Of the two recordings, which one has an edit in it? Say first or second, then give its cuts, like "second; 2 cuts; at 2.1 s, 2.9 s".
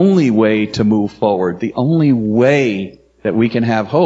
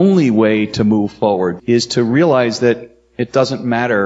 second; 1 cut; at 1.6 s